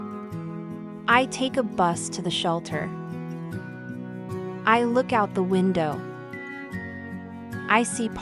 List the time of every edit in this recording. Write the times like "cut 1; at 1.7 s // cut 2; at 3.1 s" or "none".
none